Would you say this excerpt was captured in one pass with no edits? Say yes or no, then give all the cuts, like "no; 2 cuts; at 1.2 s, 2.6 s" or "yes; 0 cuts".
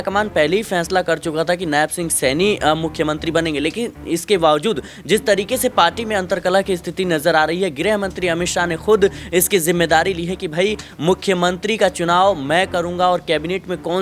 yes; 0 cuts